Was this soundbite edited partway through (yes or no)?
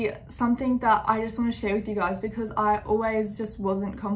no